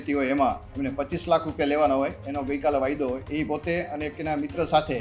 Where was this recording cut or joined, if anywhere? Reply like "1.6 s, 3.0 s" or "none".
3.2 s